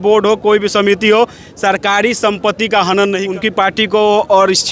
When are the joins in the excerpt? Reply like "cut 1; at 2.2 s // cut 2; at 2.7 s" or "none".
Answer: cut 1; at 3.2 s